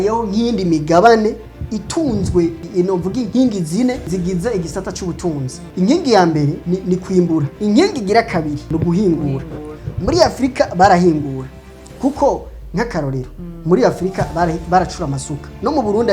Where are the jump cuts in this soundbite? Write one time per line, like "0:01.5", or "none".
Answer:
0:04.1
0:05.7
0:07.5